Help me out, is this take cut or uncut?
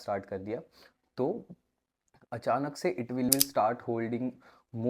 cut